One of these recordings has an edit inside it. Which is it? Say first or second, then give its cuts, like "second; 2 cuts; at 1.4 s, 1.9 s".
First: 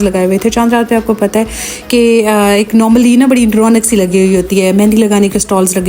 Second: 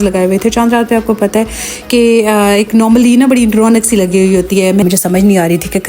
second; 1 cut; at 4.8 s